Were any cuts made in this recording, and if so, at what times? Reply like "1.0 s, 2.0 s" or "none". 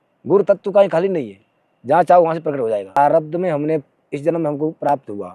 3.0 s